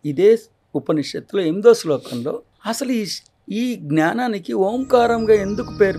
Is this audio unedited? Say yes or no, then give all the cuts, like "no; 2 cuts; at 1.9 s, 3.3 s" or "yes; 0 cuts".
no; 1 cut; at 2.5 s